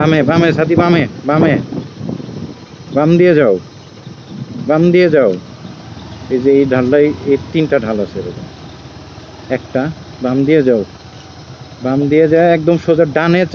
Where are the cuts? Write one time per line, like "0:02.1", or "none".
none